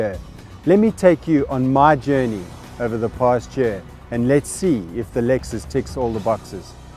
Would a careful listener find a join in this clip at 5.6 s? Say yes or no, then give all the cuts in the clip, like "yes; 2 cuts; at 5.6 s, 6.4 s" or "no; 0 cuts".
yes; 1 cut; at 5.6 s